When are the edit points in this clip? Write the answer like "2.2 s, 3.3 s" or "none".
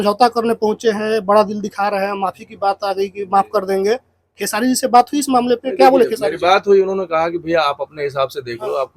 none